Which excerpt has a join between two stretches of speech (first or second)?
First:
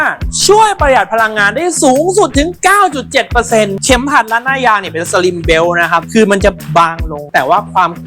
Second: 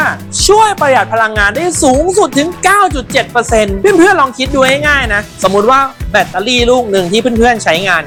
first